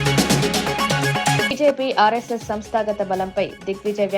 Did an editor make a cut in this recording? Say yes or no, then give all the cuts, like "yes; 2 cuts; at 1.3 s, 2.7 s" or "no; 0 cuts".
yes; 1 cut; at 1.4 s